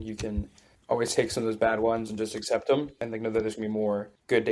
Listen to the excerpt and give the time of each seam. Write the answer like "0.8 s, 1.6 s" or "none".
none